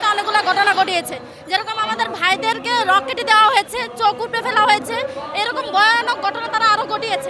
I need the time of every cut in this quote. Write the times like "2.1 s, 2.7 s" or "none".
none